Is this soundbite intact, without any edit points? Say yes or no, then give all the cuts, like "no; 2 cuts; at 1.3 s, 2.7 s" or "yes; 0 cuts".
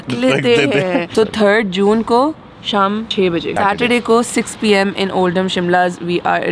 no; 2 cuts; at 1.1 s, 3.4 s